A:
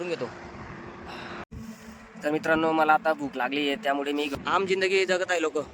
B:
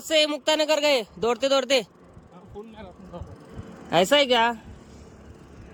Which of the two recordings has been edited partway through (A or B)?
A